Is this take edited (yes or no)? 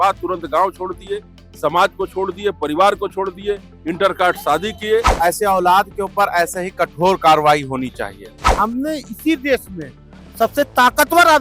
yes